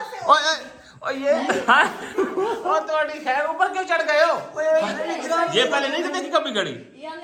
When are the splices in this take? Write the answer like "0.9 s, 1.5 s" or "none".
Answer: none